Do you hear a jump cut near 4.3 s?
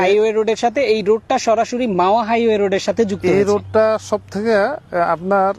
no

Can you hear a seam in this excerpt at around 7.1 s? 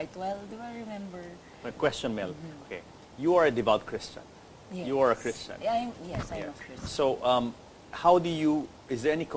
yes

